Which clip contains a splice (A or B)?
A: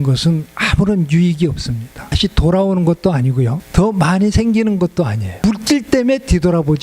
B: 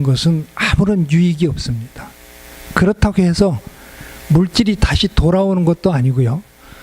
A